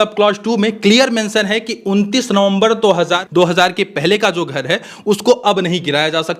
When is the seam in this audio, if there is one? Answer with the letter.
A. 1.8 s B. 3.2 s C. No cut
B